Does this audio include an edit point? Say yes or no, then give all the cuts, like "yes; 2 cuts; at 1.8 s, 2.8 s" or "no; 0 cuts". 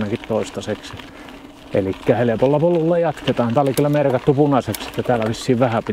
no; 0 cuts